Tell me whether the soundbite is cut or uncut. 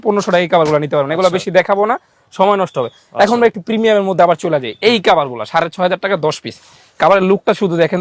uncut